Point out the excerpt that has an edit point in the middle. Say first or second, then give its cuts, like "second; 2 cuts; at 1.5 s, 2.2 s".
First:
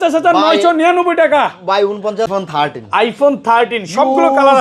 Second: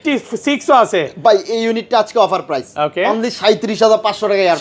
first; 1 cut; at 2.3 s